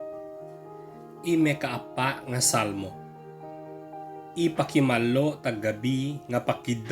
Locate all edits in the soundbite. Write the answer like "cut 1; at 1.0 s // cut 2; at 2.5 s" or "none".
cut 1; at 1.2 s // cut 2; at 2.9 s // cut 3; at 4.4 s